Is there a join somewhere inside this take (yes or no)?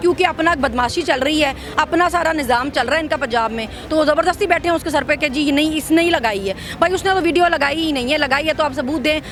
no